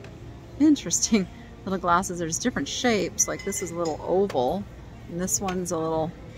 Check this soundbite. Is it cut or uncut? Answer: uncut